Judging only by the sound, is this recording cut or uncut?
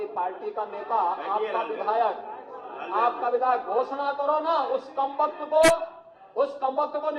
uncut